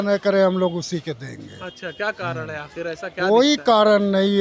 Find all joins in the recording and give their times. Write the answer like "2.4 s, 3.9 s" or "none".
none